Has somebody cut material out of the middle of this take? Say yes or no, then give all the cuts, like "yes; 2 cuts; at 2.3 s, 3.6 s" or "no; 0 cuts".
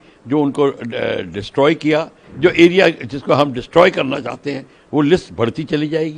yes; 1 cut; at 2.2 s